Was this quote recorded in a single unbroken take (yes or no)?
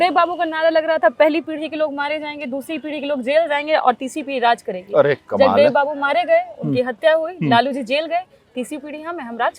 yes